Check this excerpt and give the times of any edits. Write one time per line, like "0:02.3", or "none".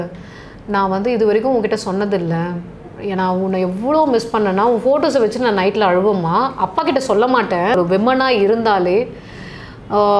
0:07.7